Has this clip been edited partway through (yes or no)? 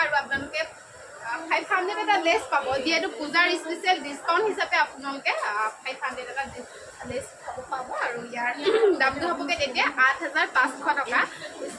no